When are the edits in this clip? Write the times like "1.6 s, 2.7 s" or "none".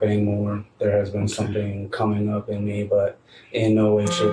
none